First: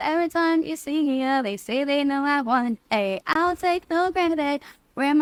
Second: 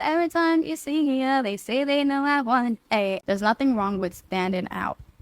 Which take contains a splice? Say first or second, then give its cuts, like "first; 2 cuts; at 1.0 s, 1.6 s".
second; 1 cut; at 3.2 s